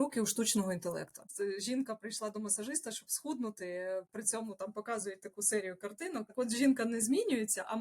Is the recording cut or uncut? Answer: cut